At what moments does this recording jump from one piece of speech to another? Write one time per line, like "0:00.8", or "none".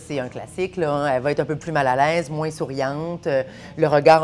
none